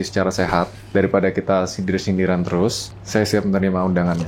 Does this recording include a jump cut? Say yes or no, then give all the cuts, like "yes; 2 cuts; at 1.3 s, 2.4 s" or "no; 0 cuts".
yes; 1 cut; at 2.9 s